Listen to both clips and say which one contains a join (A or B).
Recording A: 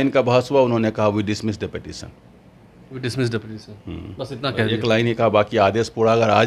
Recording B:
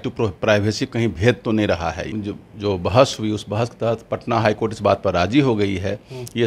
B